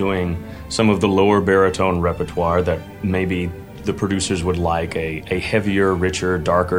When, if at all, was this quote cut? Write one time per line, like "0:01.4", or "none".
0:02.9
0:03.8